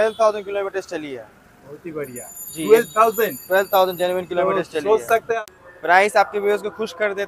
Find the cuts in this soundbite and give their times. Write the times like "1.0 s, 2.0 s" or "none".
5.3 s